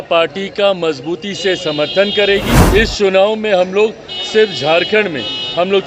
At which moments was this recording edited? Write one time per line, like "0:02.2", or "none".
0:02.6